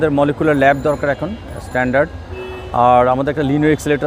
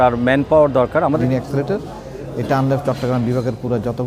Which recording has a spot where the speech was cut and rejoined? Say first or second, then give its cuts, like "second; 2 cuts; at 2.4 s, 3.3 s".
second; 1 cut; at 1.1 s